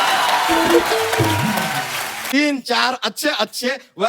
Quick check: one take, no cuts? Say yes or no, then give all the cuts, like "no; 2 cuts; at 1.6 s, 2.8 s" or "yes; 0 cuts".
no; 1 cut; at 2.1 s